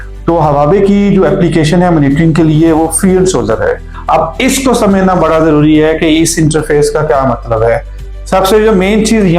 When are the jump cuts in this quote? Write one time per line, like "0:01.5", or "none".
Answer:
0:03.9